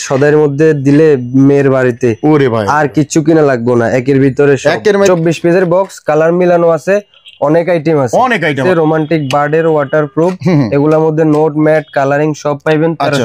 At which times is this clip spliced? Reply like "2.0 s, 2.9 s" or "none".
5.1 s, 8.6 s